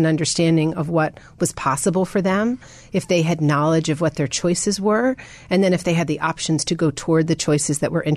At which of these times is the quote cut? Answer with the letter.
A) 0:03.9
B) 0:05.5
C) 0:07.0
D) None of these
D